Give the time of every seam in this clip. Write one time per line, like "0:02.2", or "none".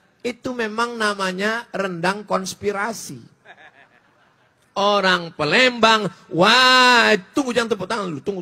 none